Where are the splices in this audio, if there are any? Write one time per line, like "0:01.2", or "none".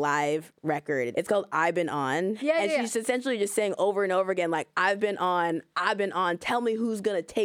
0:01.1
0:02.4